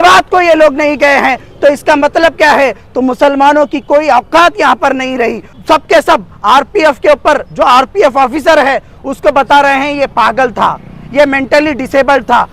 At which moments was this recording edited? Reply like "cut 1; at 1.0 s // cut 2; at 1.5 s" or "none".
cut 1; at 5.5 s